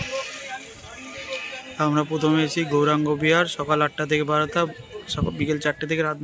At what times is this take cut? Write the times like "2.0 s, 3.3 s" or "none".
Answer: none